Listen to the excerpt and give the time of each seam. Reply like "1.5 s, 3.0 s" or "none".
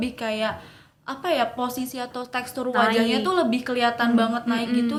none

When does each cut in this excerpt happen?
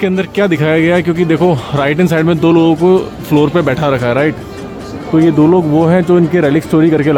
none

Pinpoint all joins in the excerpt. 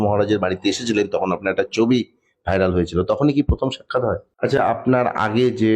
4.6 s

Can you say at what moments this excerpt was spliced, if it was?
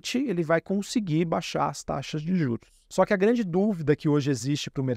2.8 s

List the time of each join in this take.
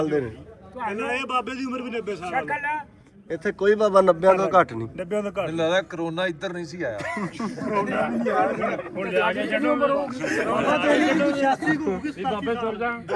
none

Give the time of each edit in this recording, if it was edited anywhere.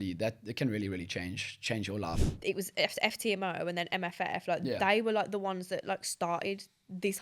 2.2 s

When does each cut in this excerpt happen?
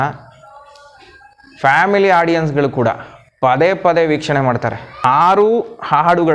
5.0 s

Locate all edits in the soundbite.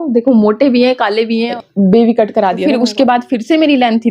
1.5 s, 2.6 s

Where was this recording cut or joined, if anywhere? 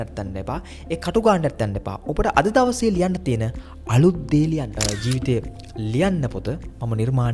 4.8 s

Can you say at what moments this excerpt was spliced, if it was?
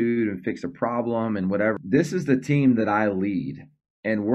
1.8 s

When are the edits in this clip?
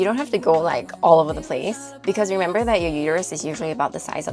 none

